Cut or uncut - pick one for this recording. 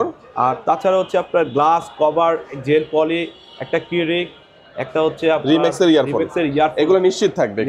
uncut